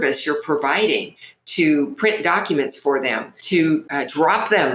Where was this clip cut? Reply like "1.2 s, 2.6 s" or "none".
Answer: 3.7 s